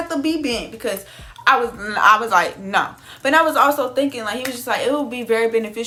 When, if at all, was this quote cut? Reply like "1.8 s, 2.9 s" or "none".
none